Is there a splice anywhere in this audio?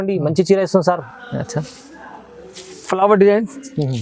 yes; 1 cut; at 1.1 s

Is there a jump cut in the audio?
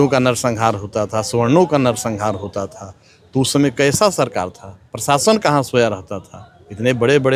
no; 0 cuts

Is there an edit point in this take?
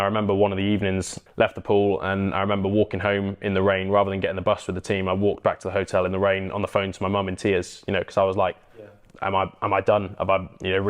yes; 1 cut; at 1.2 s

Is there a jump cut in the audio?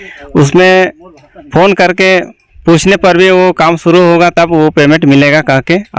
no; 0 cuts

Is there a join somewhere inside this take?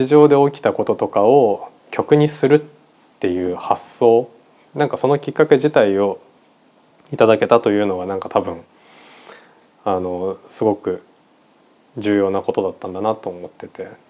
no; 0 cuts

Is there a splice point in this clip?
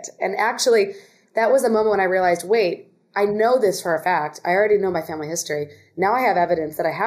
no; 0 cuts

